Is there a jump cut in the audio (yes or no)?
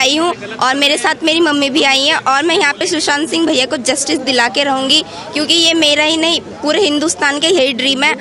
no